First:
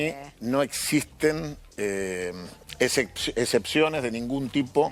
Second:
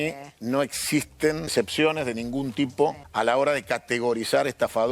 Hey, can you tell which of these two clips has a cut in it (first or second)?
second